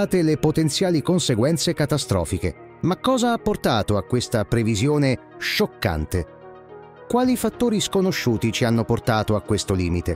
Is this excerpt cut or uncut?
cut